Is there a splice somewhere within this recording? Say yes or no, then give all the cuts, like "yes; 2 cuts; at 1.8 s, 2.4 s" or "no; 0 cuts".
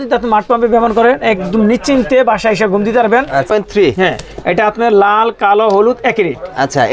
yes; 1 cut; at 3.5 s